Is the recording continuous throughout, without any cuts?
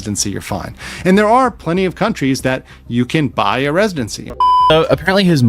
no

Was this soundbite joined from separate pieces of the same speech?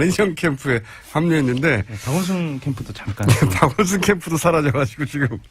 yes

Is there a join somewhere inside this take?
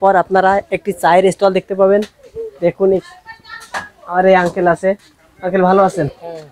no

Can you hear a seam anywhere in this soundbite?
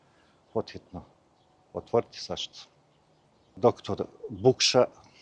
yes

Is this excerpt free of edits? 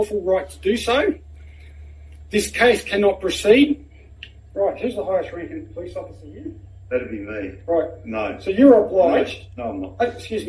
yes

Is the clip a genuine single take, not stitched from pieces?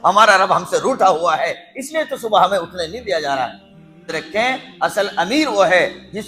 no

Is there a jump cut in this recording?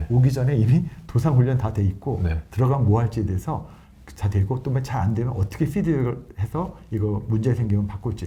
no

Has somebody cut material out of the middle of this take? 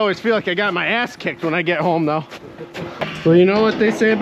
yes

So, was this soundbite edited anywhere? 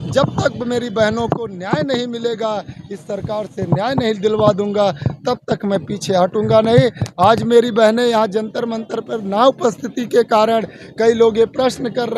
no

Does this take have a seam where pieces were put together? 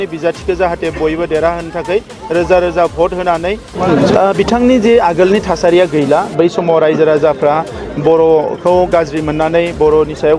yes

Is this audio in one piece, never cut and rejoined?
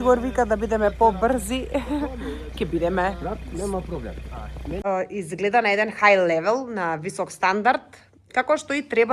no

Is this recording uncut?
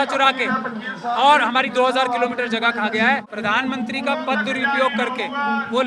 no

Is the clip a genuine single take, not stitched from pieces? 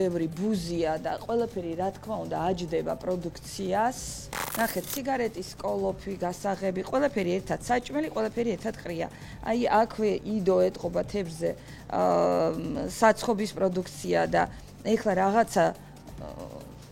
yes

